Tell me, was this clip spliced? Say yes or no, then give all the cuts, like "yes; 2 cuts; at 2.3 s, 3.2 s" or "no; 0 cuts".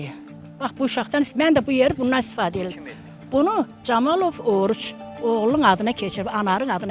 no; 0 cuts